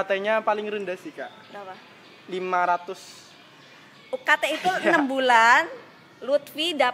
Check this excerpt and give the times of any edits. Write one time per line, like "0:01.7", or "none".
none